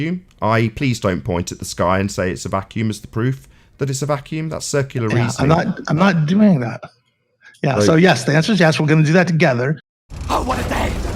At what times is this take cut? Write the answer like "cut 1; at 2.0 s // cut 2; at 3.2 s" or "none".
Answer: cut 1; at 9.9 s